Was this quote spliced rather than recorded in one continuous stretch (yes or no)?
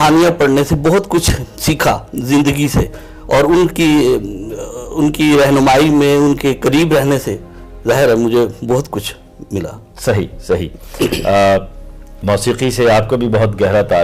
no